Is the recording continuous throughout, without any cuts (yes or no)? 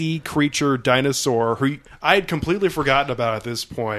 no